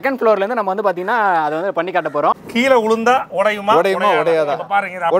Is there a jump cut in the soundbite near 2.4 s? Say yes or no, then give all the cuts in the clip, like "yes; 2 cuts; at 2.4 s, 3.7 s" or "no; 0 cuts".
yes; 1 cut; at 2.4 s